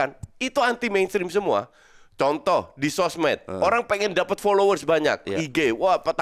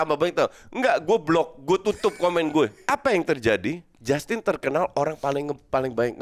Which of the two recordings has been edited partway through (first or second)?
second